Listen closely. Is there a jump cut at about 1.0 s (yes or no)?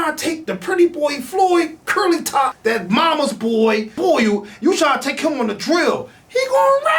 no